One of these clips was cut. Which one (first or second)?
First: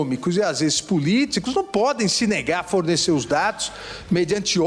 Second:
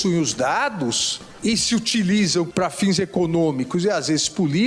second